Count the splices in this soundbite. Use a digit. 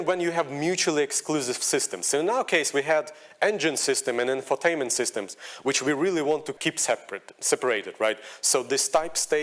1